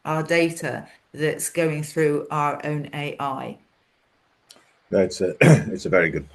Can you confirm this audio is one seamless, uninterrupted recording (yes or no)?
yes